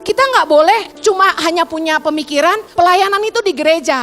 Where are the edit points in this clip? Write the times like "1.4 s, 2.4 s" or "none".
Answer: 0.9 s, 2.6 s

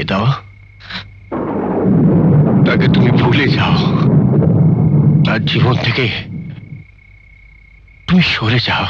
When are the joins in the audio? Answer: none

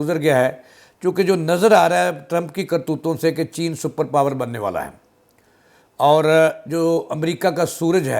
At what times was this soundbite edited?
none

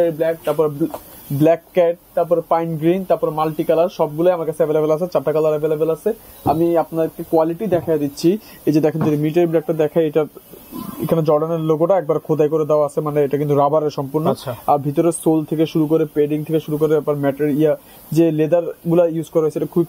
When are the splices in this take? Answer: none

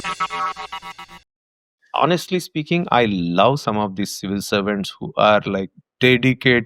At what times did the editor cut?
1.8 s

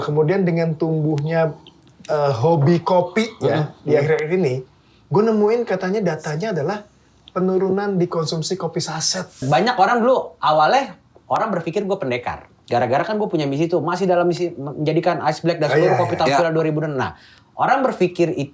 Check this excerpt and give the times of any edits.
9.4 s

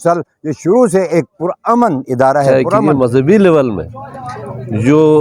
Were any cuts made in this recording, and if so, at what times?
2.6 s

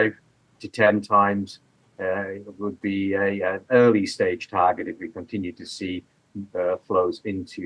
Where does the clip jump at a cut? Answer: none

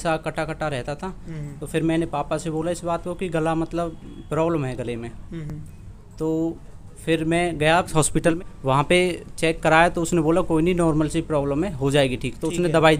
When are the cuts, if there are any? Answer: none

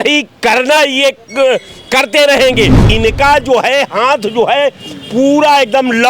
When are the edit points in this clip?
2.9 s

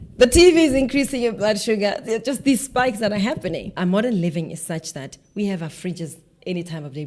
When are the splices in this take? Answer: 3.8 s

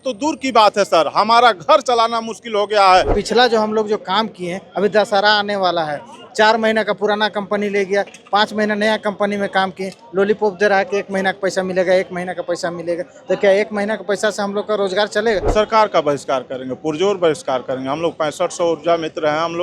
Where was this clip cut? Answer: 3.1 s, 15.5 s

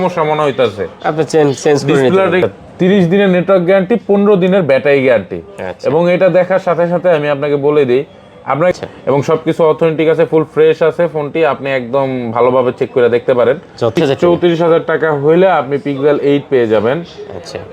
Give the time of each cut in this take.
2.4 s, 8.7 s, 14.0 s

